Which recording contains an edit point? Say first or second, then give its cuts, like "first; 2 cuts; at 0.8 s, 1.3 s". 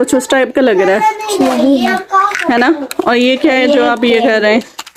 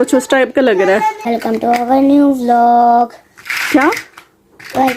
second; 1 cut; at 1.2 s